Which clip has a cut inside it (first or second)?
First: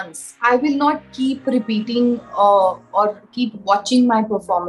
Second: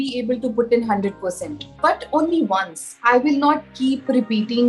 second